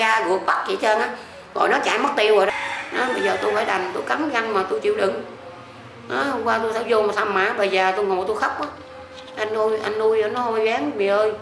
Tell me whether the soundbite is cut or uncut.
cut